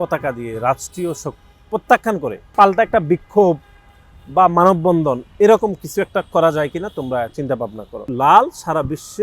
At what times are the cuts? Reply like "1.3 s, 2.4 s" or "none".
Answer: 2.5 s, 8.1 s